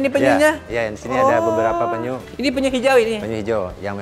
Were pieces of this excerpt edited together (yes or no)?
no